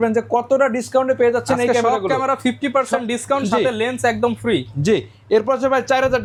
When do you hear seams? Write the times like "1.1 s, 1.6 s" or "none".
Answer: none

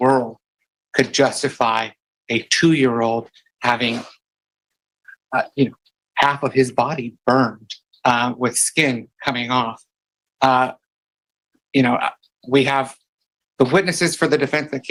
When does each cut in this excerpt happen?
none

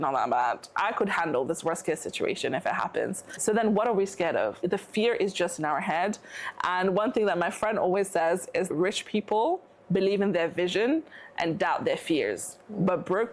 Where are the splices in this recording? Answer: 3.3 s, 4.6 s, 8.7 s

